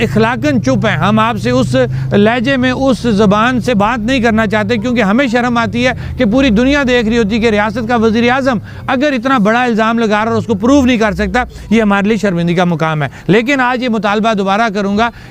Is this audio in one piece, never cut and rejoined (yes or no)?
yes